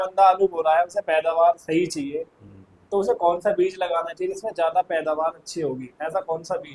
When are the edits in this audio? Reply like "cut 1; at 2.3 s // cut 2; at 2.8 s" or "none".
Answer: none